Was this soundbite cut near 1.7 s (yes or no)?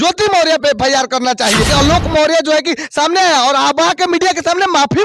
yes